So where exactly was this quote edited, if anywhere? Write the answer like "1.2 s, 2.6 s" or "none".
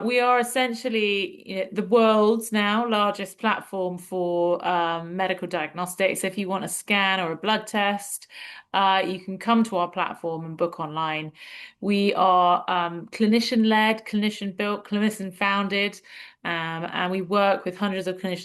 none